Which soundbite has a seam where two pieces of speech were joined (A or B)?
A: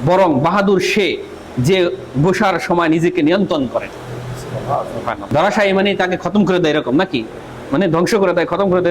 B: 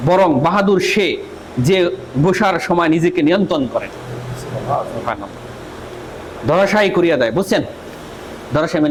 A